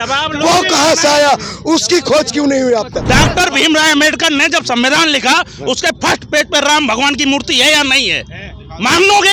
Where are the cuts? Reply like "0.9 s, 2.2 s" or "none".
3.0 s